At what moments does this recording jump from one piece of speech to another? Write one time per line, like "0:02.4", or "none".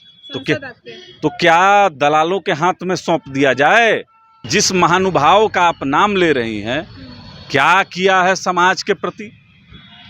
0:04.4